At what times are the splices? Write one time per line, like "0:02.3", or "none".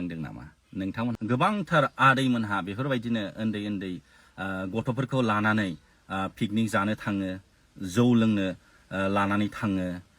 0:01.2